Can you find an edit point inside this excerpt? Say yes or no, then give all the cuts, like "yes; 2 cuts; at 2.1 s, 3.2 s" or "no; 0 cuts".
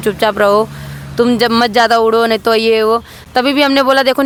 no; 0 cuts